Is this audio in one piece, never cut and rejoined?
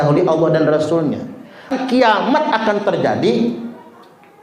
no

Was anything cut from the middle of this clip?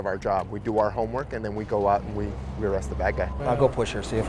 yes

